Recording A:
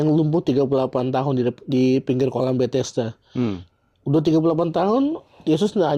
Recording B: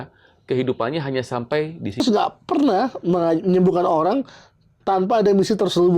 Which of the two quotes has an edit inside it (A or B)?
B